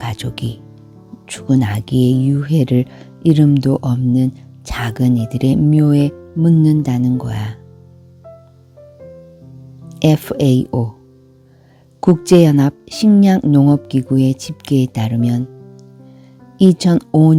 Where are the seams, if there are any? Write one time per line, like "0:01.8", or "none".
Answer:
none